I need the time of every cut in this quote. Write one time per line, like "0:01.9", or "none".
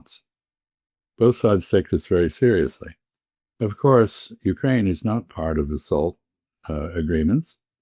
none